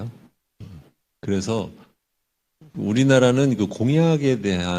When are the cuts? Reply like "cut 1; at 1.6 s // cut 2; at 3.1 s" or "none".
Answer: cut 1; at 1.4 s